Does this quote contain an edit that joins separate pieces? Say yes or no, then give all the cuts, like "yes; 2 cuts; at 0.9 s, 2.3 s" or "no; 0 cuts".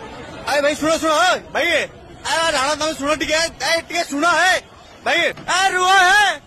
yes; 1 cut; at 5.4 s